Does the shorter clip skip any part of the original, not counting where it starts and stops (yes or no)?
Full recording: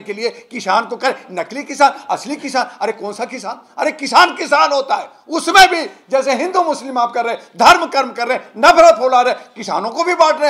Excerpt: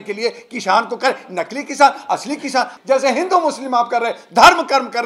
yes